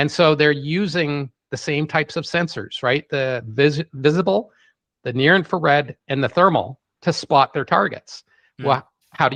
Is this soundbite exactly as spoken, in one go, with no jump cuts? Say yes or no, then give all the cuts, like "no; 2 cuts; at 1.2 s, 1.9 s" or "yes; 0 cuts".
yes; 0 cuts